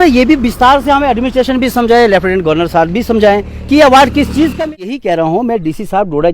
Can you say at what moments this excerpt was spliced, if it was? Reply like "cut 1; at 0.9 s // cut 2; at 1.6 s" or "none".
cut 1; at 4.6 s

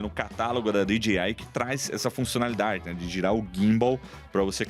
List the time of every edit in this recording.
none

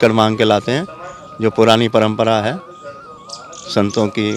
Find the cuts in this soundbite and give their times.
none

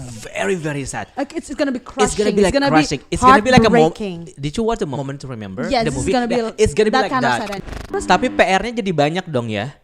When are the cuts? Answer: cut 1; at 5.0 s // cut 2; at 7.5 s

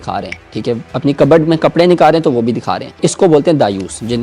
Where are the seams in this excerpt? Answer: cut 1; at 3.0 s

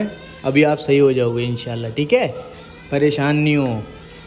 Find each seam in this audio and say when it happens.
none

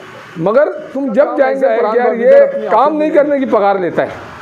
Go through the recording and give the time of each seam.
cut 1; at 1.8 s

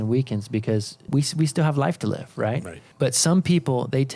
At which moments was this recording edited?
cut 1; at 1.0 s // cut 2; at 2.8 s

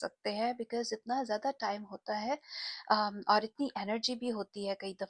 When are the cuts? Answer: none

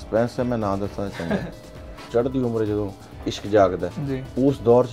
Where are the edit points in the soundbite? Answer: cut 1; at 2.1 s

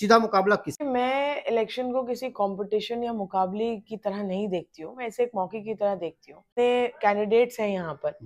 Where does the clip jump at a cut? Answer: cut 1; at 0.8 s // cut 2; at 6.4 s

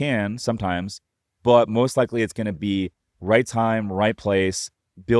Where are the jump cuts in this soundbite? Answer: none

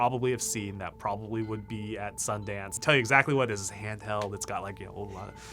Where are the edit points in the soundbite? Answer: cut 1; at 2.8 s

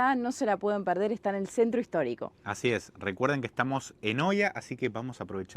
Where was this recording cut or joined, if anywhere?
none

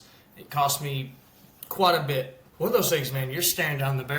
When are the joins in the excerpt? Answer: cut 1; at 2.4 s

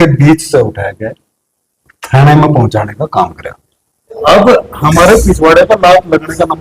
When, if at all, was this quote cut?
cut 1; at 4.2 s

